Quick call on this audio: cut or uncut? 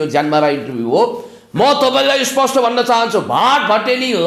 uncut